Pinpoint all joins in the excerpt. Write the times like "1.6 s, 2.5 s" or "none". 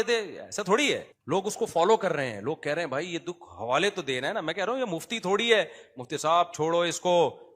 1.1 s